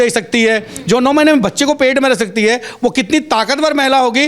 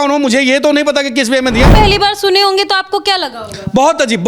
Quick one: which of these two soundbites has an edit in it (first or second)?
second